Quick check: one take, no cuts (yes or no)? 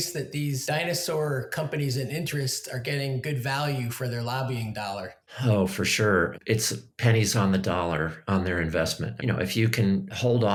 yes